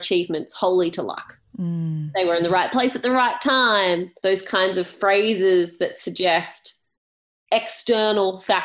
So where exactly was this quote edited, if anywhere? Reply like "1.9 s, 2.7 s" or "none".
none